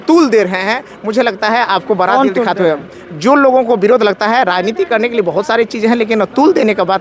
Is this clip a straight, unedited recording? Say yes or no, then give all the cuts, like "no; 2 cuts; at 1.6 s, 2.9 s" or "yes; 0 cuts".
yes; 0 cuts